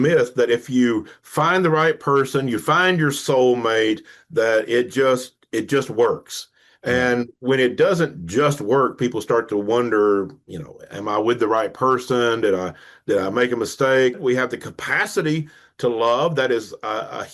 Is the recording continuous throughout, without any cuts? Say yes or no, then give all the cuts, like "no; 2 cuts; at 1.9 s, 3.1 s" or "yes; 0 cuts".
no; 1 cut; at 14.2 s